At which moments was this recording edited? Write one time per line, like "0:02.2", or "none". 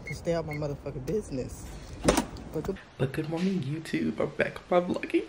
0:02.8